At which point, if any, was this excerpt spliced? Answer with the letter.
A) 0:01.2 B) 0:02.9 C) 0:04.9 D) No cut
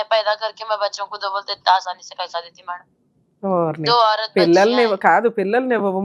D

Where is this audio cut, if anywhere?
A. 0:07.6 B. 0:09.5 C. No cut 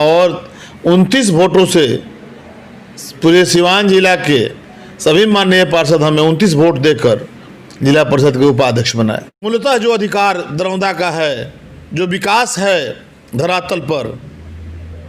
B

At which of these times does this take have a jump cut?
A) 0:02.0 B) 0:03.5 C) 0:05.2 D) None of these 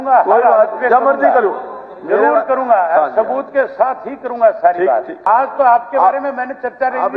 C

